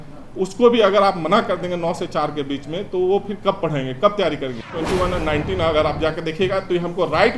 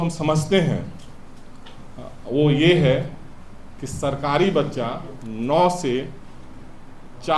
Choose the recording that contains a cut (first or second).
first